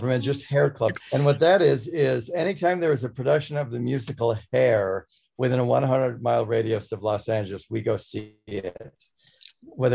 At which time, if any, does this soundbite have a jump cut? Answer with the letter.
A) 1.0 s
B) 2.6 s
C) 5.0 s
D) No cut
A